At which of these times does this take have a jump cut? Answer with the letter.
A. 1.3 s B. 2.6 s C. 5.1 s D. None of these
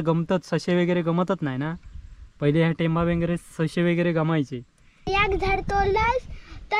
C